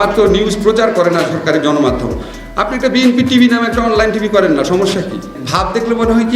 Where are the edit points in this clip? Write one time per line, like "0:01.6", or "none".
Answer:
0:05.4